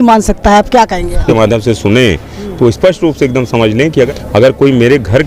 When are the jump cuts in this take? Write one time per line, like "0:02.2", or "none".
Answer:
0:01.2
0:04.1